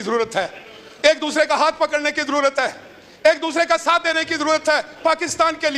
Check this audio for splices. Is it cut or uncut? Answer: uncut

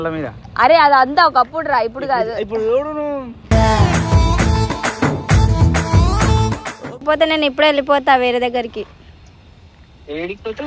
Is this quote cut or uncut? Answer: cut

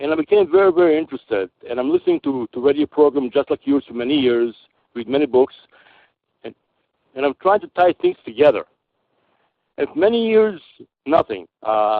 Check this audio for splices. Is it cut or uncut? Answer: uncut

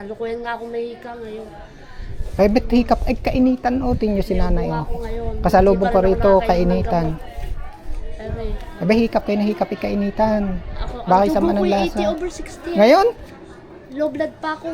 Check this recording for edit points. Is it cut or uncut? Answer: uncut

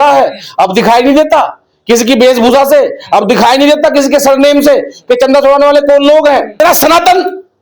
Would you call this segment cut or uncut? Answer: cut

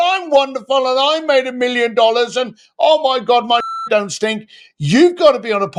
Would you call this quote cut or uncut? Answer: uncut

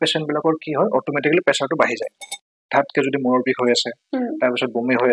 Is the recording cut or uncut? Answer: cut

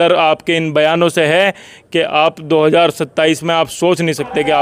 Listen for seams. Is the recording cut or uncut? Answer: uncut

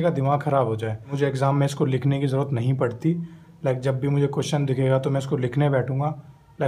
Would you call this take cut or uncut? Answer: cut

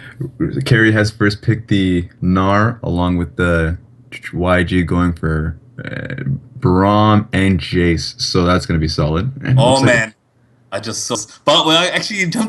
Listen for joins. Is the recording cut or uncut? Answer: cut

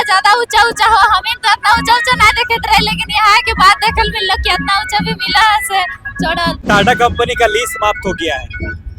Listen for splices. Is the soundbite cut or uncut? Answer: cut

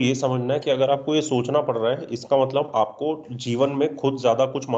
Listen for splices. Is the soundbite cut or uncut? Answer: uncut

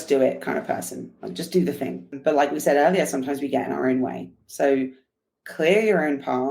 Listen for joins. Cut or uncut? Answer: cut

